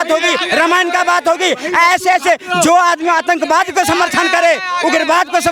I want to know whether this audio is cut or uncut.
uncut